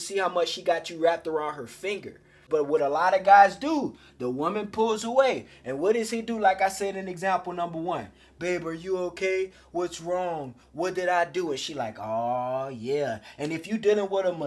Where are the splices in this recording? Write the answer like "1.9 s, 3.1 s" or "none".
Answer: 2.5 s